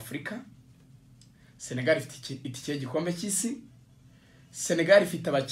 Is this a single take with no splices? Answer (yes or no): yes